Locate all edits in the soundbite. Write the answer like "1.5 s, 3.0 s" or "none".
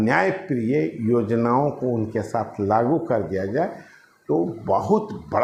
none

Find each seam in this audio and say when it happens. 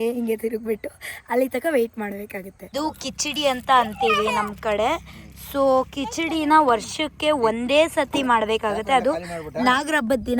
2.7 s

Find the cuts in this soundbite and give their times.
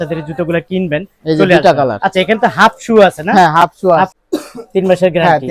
4.2 s

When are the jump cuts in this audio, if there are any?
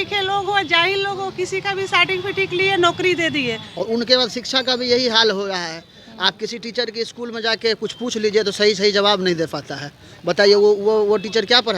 3.7 s

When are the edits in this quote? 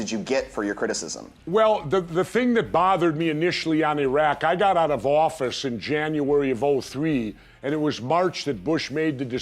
none

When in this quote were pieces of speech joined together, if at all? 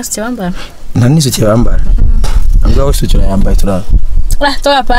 none

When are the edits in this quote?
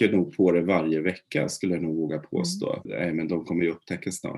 2.9 s

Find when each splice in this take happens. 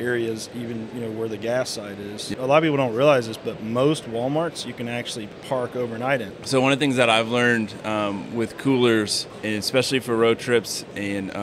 2.3 s, 6.3 s, 9.3 s

